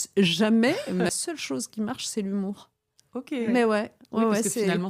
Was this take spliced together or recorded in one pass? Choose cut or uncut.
cut